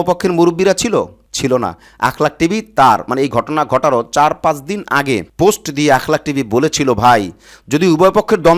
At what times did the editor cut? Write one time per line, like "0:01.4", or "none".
none